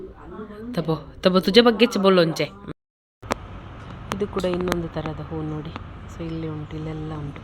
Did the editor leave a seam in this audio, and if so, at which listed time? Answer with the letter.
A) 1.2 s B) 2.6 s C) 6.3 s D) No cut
B